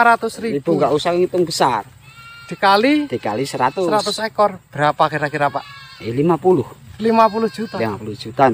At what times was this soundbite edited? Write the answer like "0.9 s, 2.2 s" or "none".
none

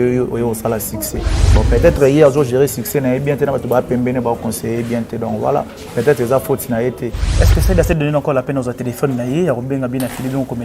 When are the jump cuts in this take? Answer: 1.4 s, 7.3 s

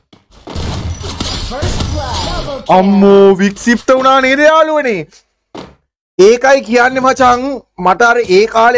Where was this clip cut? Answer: none

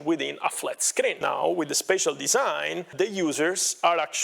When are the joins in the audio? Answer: 1.2 s, 2.9 s

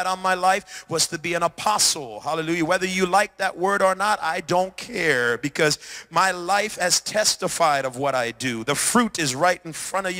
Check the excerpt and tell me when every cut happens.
none

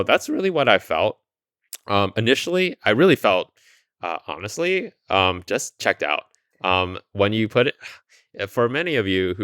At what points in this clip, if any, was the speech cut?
none

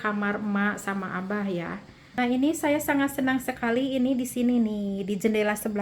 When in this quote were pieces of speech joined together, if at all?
2.2 s

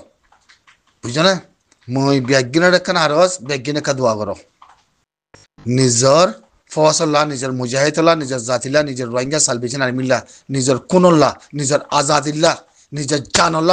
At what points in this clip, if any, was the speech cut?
none

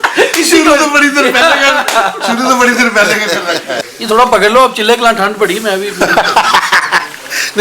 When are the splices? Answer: 3.8 s

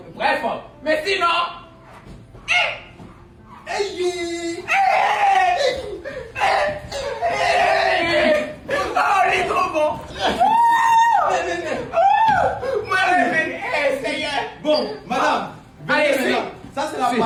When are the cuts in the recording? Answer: none

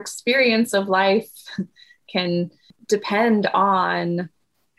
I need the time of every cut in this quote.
2.7 s

